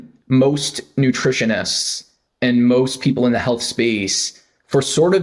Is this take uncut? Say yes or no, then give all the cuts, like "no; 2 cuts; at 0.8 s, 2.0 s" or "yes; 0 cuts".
yes; 0 cuts